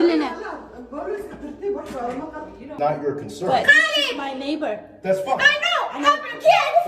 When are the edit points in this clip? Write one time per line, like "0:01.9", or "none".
0:02.7